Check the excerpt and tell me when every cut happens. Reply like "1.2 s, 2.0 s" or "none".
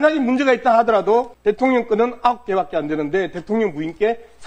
1.3 s